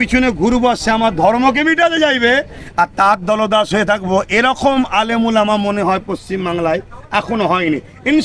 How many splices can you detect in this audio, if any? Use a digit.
0